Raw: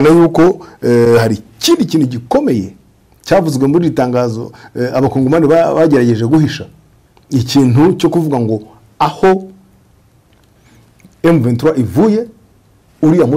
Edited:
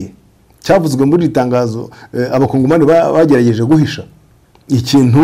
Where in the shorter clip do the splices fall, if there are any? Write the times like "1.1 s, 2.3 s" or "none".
none